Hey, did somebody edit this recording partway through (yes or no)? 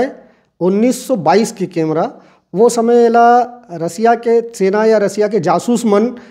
no